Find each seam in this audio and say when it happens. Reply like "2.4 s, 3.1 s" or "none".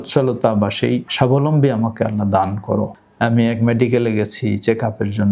1.1 s, 3.0 s